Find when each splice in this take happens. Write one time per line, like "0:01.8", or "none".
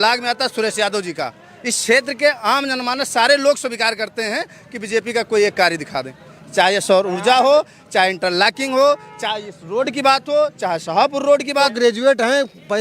0:11.7